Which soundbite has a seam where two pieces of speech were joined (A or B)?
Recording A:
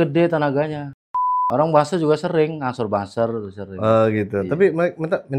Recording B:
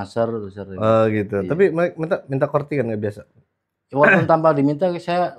A